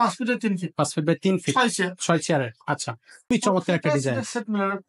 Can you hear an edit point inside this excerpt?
yes; 1 cut; at 3.3 s

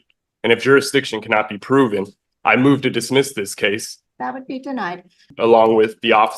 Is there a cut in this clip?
yes; 2 cuts; at 3.9 s, 5.3 s

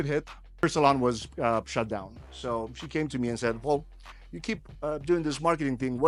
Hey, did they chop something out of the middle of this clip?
no; 0 cuts

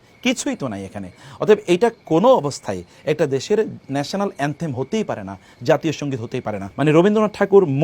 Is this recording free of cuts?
no; 1 cut; at 6.6 s

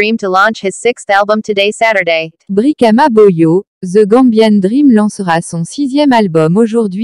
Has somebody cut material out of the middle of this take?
yes; 1 cut; at 2.4 s

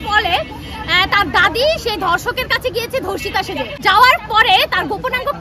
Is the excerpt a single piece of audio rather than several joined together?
no; 1 cut; at 3.8 s

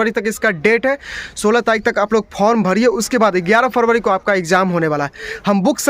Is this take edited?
no; 0 cuts

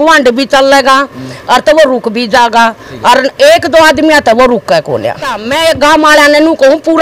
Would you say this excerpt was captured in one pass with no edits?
no; 1 cut; at 5.4 s

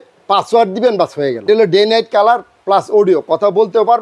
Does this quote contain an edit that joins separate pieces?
yes; 1 cut; at 1.4 s

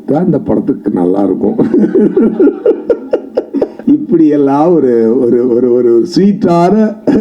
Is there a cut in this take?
yes; 1 cut; at 3.8 s

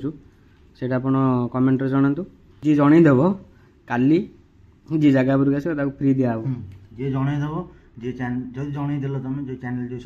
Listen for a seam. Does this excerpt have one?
yes; 1 cut; at 2.5 s

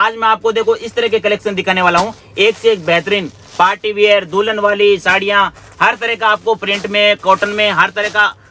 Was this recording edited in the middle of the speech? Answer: no; 0 cuts

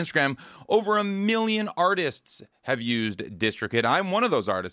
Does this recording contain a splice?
no; 0 cuts

